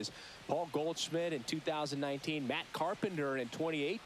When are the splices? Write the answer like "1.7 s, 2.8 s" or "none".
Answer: none